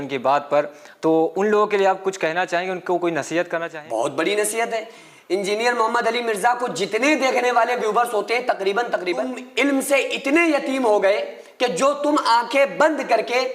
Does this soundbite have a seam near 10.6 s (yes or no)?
no